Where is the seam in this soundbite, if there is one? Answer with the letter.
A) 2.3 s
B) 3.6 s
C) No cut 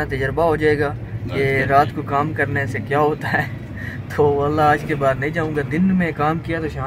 C